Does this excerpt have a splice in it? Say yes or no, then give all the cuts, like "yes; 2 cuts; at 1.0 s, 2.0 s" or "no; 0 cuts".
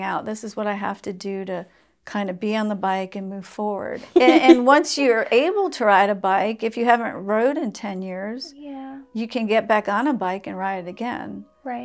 yes; 1 cut; at 4.0 s